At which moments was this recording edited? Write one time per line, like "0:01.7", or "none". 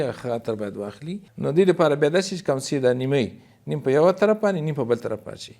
0:01.2